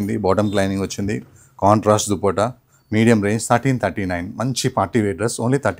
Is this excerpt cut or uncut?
uncut